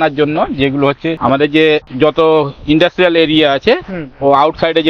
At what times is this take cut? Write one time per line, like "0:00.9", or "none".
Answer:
0:01.2

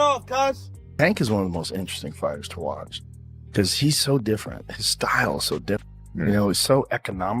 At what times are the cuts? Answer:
0:00.9
0:06.0

